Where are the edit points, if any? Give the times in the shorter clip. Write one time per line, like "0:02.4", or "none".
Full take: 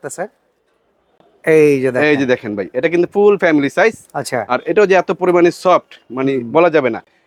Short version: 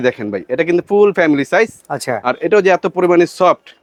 none